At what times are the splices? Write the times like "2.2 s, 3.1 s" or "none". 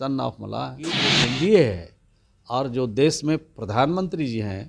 1.1 s